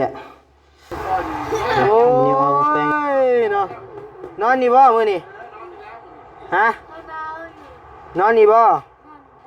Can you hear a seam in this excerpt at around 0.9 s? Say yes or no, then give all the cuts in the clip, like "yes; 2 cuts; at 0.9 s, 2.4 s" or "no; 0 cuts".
yes; 1 cut; at 0.9 s